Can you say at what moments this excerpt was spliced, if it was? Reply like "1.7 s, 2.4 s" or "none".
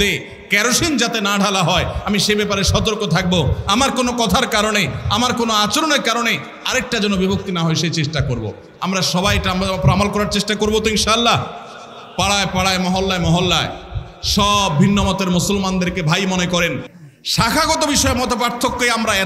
16.9 s